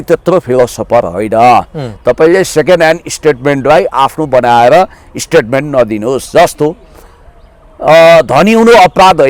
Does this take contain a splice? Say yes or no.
no